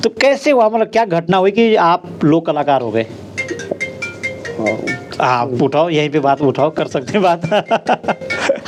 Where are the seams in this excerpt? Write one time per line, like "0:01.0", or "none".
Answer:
none